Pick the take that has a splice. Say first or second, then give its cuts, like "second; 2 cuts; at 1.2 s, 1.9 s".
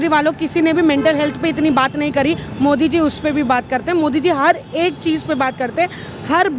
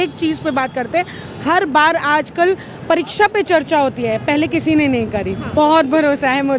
second; 1 cut; at 5.5 s